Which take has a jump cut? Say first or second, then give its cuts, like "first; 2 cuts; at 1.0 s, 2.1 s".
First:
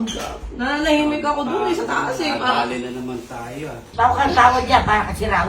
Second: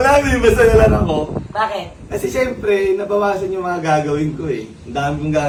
first; 1 cut; at 3.8 s